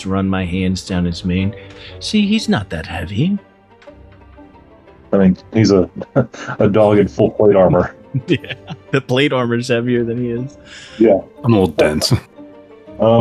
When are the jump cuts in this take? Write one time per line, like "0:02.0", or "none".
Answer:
none